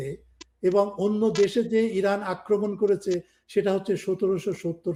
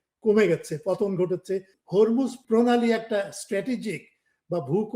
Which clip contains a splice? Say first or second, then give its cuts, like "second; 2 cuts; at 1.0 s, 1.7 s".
second; 2 cuts; at 1.7 s, 2.4 s